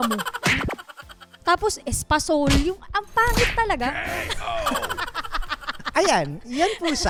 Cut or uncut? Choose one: uncut